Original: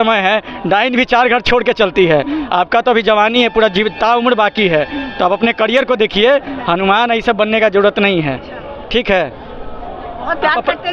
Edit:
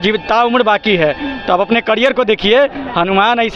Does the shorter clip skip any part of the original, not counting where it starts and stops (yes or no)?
no